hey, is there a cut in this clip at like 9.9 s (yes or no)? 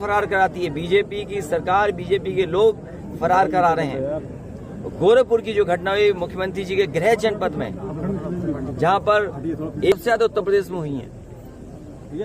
yes